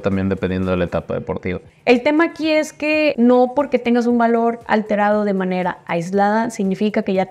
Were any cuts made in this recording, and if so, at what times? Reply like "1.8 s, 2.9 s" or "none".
1.7 s, 3.1 s